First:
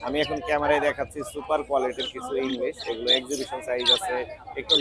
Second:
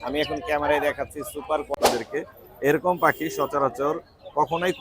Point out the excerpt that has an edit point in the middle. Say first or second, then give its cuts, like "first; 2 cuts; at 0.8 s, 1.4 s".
second; 1 cut; at 1.7 s